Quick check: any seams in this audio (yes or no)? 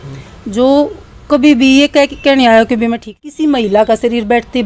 yes